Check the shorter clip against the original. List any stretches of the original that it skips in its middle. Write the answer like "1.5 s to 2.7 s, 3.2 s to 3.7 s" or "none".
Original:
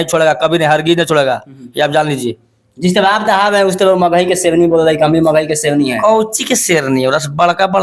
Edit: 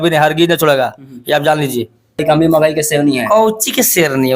2.7 s to 5.0 s